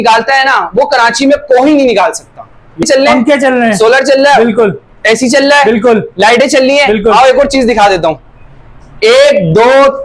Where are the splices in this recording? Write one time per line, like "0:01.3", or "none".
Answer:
0:02.8